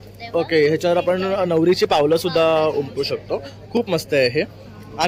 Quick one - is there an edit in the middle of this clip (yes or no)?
no